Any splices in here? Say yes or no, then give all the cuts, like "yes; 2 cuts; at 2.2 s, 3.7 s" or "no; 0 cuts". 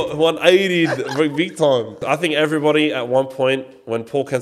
yes; 1 cut; at 2.0 s